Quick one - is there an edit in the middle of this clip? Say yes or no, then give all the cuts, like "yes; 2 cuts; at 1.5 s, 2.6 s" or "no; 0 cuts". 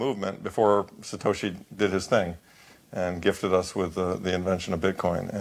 no; 0 cuts